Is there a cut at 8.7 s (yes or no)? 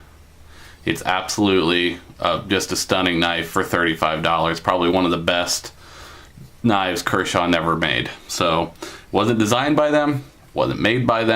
no